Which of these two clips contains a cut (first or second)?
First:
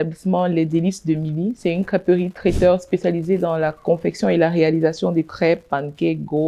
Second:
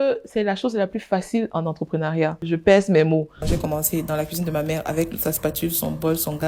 second